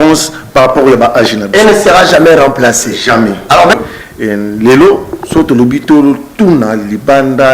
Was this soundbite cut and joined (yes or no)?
yes